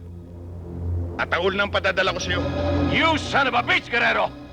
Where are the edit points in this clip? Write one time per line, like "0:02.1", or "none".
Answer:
0:02.3